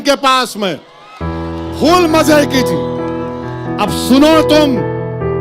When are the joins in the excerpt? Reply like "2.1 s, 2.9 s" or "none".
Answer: 2.6 s, 3.9 s